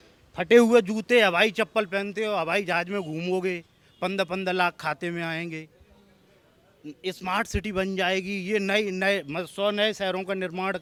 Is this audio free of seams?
yes; 0 cuts

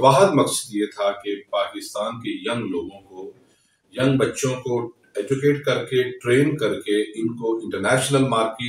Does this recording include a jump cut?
no; 0 cuts

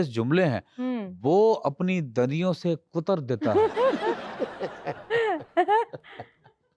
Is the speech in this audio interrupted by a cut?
no; 0 cuts

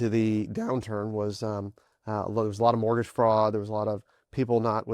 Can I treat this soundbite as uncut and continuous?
yes; 0 cuts

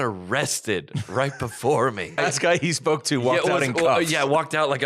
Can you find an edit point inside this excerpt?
yes; 1 cut; at 2.2 s

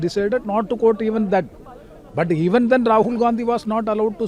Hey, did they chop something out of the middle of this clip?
no; 0 cuts

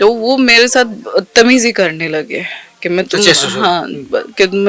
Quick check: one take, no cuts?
yes; 0 cuts

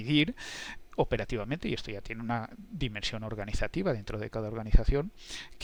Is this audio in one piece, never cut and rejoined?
yes; 0 cuts

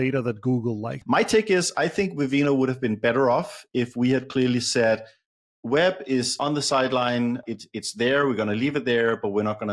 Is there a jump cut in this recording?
yes; 3 cuts; at 0.9 s, 6.3 s, 7.4 s

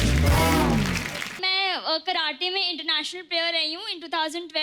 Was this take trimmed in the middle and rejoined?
yes; 1 cut; at 1.4 s

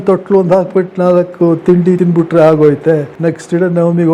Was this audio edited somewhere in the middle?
yes; 2 cuts; at 2.0 s, 3.1 s

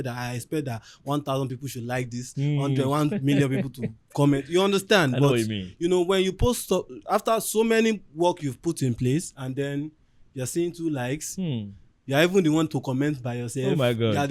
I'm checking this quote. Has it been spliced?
no; 0 cuts

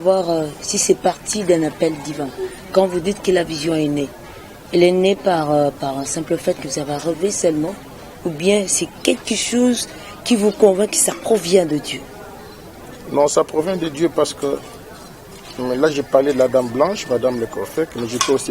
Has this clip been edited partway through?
no; 0 cuts

